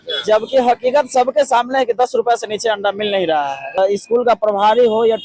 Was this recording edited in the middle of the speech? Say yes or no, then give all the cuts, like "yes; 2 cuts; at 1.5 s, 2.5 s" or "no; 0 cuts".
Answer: yes; 1 cut; at 3.8 s